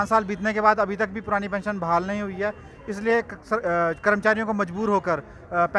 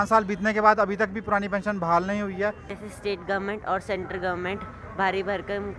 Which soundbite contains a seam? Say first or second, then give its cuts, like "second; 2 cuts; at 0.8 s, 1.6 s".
second; 1 cut; at 2.7 s